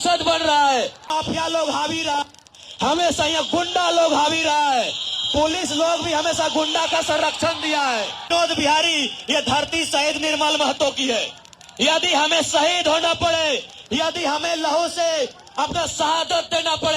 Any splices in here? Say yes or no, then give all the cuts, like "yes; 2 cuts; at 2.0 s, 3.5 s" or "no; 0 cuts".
yes; 2 cuts; at 1.1 s, 8.3 s